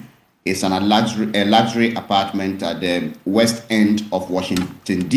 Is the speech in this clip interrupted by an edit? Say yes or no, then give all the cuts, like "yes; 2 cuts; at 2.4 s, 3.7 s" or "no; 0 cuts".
no; 0 cuts